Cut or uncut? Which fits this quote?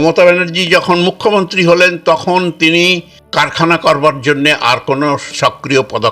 cut